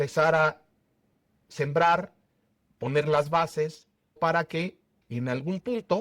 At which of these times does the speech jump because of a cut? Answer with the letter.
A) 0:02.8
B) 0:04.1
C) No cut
B